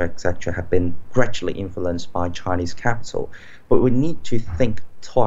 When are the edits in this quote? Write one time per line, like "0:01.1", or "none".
none